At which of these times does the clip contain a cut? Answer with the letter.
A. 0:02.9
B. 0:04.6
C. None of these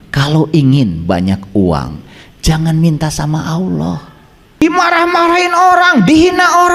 B